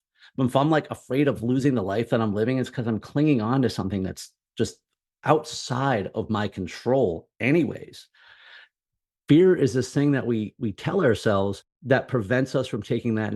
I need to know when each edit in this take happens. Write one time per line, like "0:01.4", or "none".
0:11.7